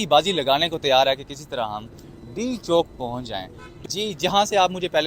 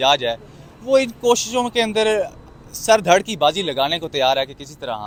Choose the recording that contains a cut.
first; 1 cut; at 3.8 s

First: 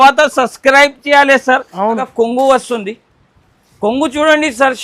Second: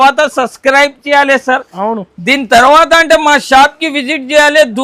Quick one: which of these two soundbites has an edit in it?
first; 1 cut; at 2.1 s

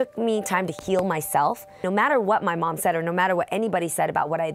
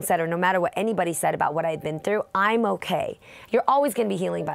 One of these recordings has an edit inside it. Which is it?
first; 1 cut; at 1.8 s

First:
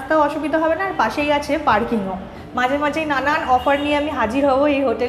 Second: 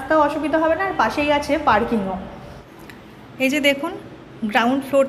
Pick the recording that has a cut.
first; 1 cut; at 2.4 s

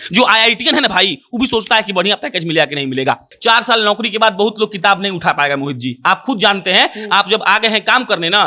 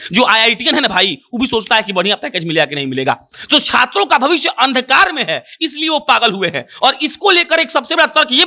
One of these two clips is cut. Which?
first; 1 cut; at 3.3 s

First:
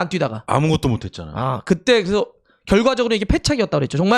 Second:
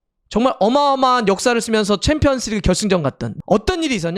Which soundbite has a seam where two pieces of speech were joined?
second; 1 cut; at 3.2 s

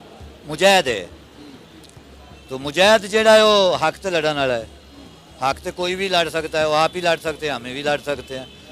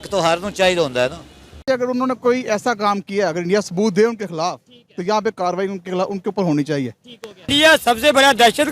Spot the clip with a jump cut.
second; 2 cuts; at 1.6 s, 7.5 s

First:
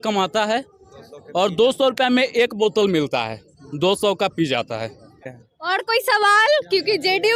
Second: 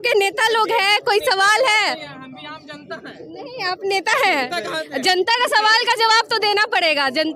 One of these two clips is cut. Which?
first; 1 cut; at 5.2 s

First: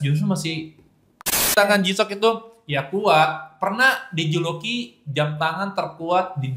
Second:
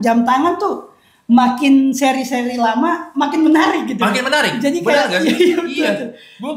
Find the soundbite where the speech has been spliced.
first; 1 cut; at 1.5 s

